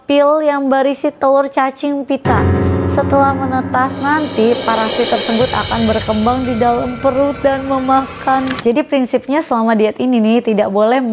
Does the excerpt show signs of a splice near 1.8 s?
no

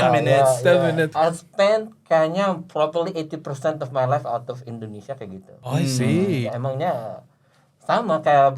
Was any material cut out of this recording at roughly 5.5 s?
yes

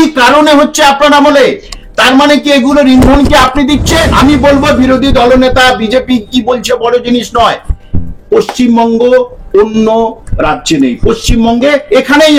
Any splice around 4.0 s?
yes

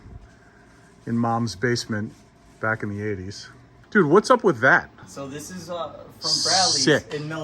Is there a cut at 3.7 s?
yes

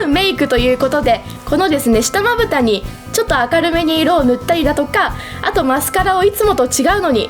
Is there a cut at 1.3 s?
no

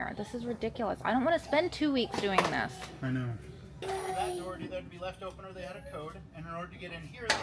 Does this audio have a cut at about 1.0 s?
no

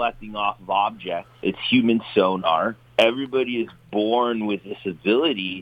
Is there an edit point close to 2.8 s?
yes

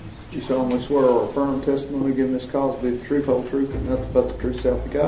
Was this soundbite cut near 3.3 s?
no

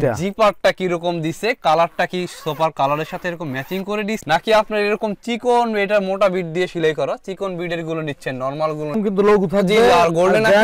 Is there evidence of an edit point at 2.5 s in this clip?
no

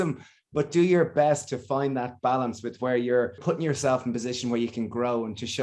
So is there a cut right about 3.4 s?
yes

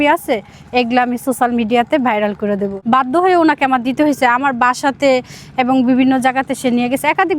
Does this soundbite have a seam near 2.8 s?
yes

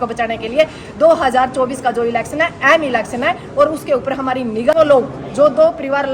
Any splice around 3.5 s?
no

